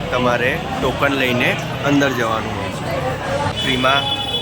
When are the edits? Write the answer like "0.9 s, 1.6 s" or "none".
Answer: 3.5 s